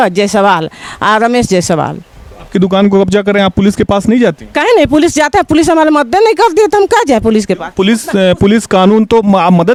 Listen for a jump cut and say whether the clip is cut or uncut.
uncut